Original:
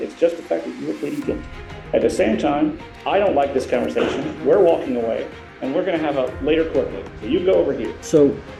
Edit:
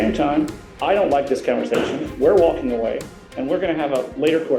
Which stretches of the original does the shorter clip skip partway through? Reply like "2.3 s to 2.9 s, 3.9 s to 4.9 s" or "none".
none